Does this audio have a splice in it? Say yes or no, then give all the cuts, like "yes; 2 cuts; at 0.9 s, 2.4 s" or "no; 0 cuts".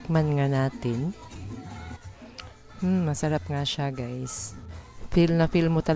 no; 0 cuts